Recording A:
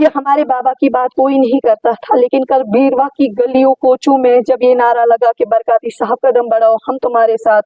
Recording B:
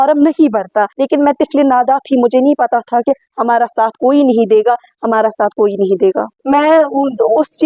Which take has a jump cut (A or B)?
B